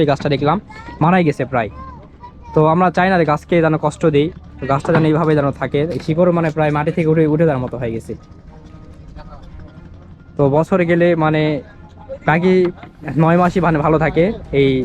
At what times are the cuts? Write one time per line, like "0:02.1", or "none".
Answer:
none